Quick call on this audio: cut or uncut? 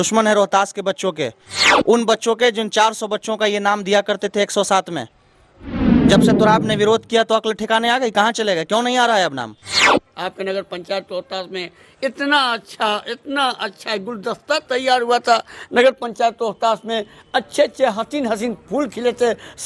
cut